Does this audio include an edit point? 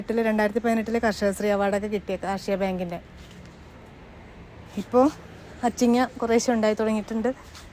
no; 0 cuts

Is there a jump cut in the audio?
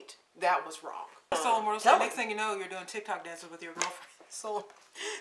yes; 1 cut; at 1.3 s

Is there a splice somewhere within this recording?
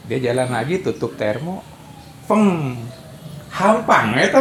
no; 0 cuts

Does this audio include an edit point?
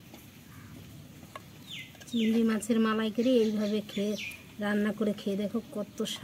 no; 0 cuts

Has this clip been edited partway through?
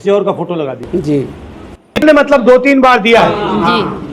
yes; 1 cut; at 2.0 s

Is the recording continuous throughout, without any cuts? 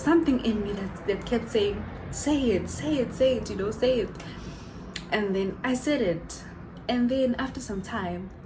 yes; 0 cuts

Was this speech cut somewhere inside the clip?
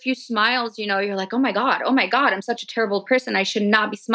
no; 0 cuts

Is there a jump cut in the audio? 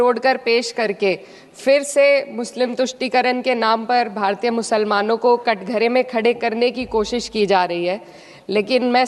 no; 0 cuts

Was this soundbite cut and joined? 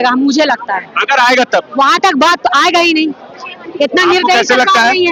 no; 0 cuts

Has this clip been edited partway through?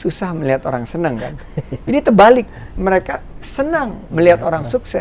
no; 0 cuts

